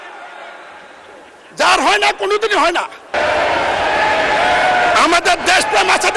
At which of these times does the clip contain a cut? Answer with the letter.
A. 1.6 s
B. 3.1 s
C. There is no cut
B